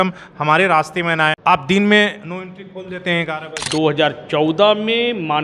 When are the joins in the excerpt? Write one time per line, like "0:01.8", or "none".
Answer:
0:01.4
0:03.5